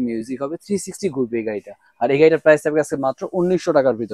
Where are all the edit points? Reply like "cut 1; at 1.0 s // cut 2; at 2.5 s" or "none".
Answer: none